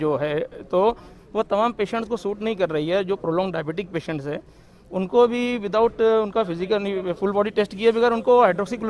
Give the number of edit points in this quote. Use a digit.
0